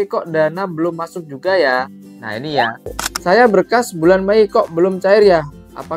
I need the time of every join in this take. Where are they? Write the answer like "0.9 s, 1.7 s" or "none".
3.1 s